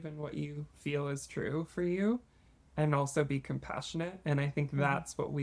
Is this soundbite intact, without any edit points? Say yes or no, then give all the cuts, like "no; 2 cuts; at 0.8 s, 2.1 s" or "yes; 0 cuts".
yes; 0 cuts